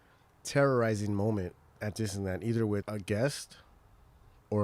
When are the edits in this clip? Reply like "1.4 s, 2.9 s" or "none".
2.9 s